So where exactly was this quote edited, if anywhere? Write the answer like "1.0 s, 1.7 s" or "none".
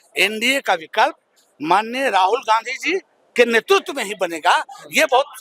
none